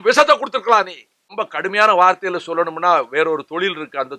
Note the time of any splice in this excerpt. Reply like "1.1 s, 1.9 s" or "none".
1.4 s